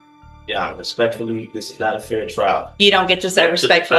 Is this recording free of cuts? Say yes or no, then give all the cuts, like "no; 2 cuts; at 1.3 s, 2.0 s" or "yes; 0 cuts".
yes; 0 cuts